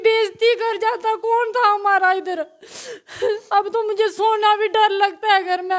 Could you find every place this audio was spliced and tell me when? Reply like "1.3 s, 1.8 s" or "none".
none

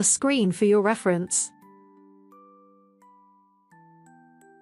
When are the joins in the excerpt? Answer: 1.3 s

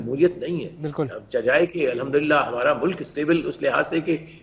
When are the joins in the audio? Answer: none

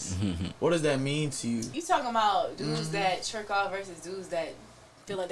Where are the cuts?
1.7 s

